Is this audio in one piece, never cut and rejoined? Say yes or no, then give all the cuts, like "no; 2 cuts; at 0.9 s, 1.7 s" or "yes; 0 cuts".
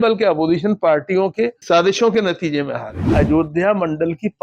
no; 1 cut; at 3.1 s